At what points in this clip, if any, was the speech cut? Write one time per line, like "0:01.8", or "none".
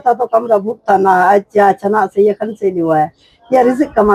none

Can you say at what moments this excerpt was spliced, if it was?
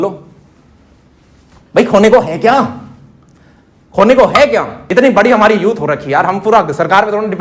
0:04.8

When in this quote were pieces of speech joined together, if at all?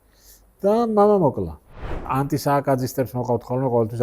0:02.0

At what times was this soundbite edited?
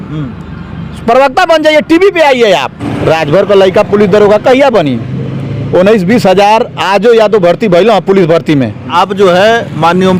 0:02.8
0:08.9

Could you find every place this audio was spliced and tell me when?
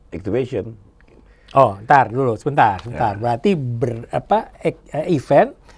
none

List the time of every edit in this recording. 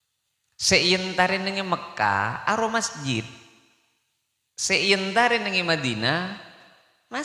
none

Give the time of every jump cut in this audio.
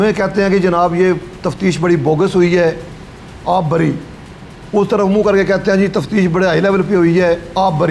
none

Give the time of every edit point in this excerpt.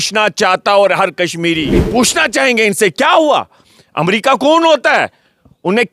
0:01.9

